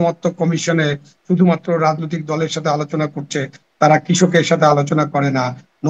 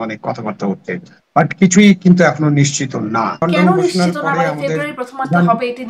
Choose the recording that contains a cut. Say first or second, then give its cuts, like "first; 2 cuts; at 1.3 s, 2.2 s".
second; 1 cut; at 3.4 s